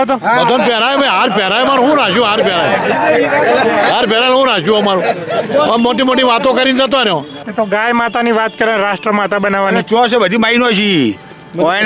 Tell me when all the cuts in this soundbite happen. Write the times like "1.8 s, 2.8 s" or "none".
7.4 s